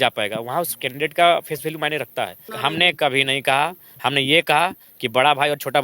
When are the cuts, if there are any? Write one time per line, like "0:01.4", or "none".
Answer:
0:02.5